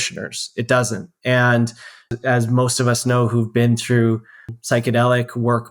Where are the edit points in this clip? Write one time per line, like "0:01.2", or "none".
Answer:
0:02.1
0:04.5